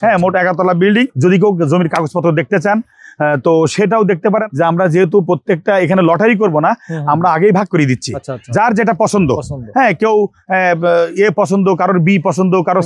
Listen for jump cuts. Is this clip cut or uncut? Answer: cut